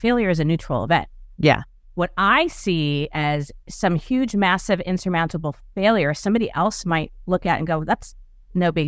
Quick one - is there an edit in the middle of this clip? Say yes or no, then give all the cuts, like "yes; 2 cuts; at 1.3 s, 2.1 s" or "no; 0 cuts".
yes; 2 cuts; at 1.2 s, 1.8 s